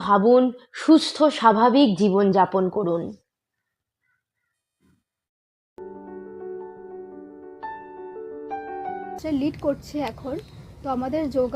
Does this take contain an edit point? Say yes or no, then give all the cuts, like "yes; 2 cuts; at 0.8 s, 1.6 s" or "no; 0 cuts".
yes; 1 cut; at 9.2 s